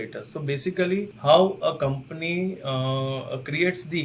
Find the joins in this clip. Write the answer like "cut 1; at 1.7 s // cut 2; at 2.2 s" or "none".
cut 1; at 1.1 s